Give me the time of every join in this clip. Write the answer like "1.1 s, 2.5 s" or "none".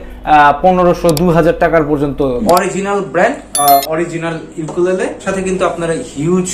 2.4 s, 5.2 s

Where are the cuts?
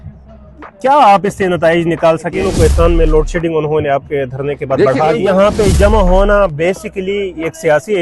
2.4 s, 5.2 s

